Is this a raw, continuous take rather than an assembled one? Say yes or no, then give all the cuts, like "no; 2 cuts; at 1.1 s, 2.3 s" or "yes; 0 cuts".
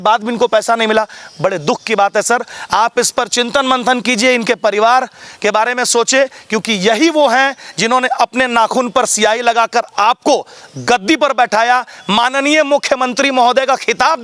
yes; 0 cuts